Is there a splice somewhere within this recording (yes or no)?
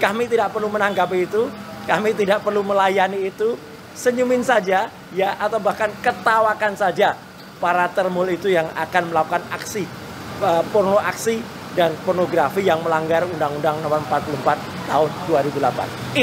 no